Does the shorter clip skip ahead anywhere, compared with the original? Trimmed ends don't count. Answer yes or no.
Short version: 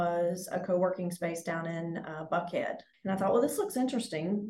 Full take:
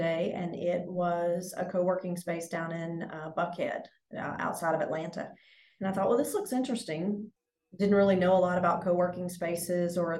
yes